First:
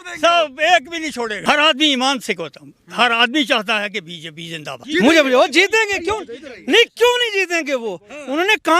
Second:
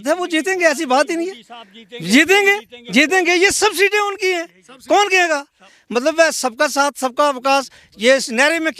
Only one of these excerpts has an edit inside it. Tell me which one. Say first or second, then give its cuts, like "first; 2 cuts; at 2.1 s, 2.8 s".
first; 2 cuts; at 1.4 s, 4.8 s